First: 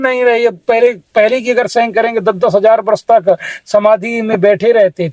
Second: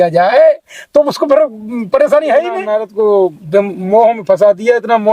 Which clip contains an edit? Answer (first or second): second